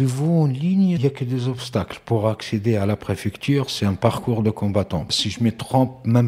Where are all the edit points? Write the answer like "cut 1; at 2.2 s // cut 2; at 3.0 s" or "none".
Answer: cut 1; at 1.0 s // cut 2; at 5.1 s